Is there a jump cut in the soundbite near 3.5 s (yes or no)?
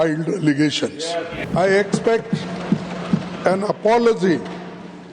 no